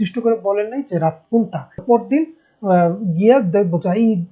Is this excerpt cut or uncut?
cut